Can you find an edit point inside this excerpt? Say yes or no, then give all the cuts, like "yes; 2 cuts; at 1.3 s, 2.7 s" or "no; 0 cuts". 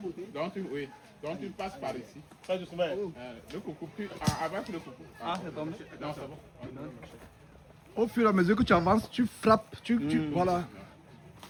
no; 0 cuts